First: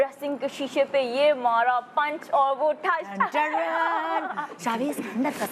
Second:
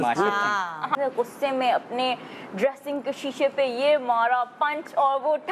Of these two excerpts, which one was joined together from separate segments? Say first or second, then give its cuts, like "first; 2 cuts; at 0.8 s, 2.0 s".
second; 1 cut; at 0.9 s